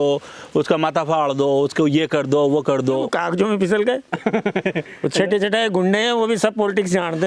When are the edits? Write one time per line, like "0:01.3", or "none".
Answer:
0:03.1